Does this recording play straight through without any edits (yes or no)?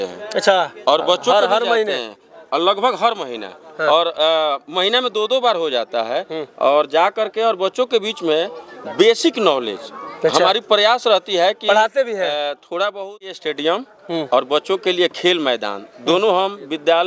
no